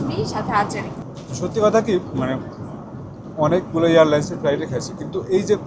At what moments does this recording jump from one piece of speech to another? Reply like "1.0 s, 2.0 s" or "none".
1.0 s